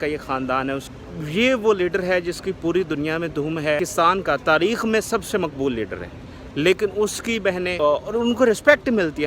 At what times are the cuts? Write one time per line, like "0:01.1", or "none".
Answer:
0:00.9
0:03.8
0:07.7